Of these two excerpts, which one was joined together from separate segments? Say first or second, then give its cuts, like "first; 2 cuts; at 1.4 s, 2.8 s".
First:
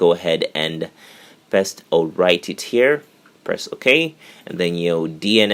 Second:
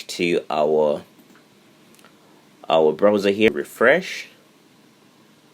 second; 1 cut; at 3.5 s